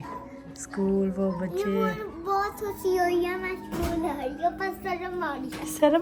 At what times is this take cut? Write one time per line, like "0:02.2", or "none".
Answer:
none